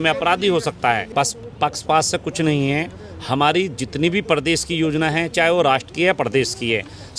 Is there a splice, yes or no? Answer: yes